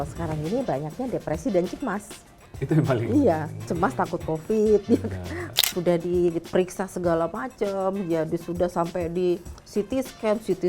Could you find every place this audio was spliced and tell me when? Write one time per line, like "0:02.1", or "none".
0:05.4

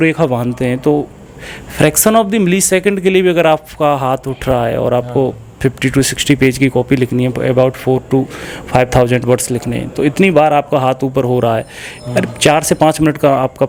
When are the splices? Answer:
none

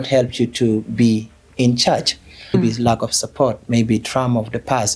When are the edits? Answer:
0:02.5

